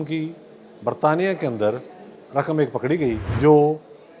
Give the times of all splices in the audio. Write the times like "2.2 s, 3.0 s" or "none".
3.3 s